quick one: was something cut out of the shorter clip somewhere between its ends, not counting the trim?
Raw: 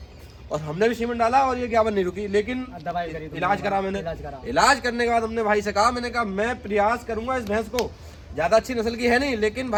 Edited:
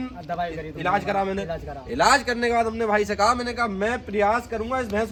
no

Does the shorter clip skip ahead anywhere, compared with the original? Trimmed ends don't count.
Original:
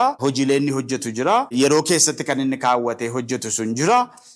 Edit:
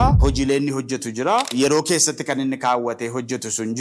no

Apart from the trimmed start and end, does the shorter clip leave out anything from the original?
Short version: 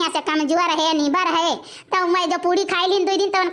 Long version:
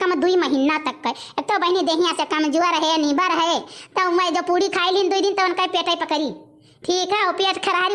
no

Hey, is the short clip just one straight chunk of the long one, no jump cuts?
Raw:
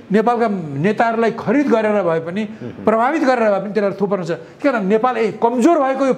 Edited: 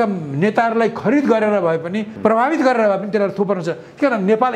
no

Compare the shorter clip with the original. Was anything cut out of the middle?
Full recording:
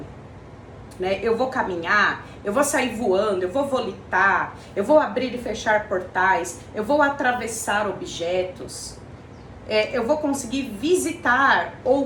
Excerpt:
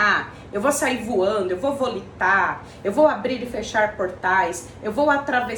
no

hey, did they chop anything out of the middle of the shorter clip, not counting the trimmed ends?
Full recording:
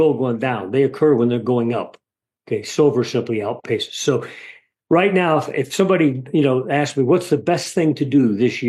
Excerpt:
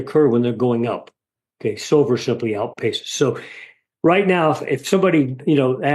no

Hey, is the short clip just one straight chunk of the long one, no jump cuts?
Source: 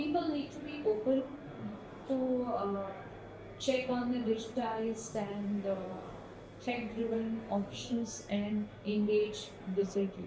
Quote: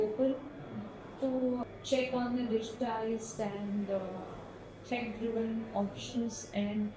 no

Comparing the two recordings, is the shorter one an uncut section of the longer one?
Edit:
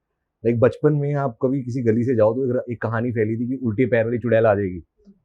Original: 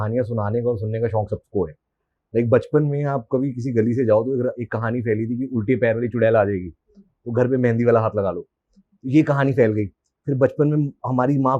yes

